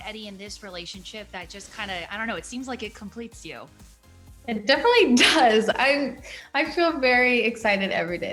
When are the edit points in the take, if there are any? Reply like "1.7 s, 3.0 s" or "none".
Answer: none